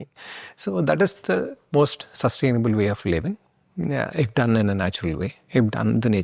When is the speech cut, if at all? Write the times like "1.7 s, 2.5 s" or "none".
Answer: none